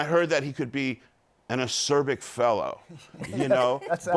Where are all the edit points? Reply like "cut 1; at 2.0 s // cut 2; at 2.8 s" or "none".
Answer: none